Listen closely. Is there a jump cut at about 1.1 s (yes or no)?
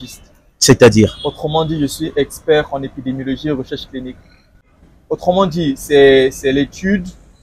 no